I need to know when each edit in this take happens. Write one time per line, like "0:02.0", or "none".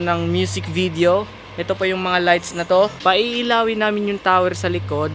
0:03.0